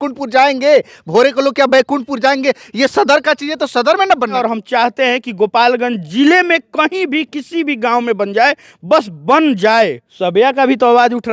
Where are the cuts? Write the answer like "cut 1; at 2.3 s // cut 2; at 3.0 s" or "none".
cut 1; at 4.4 s // cut 2; at 10.1 s